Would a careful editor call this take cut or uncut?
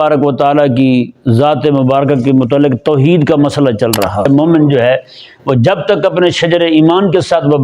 cut